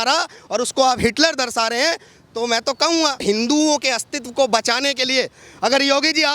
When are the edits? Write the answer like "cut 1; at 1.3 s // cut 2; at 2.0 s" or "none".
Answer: cut 1; at 3.2 s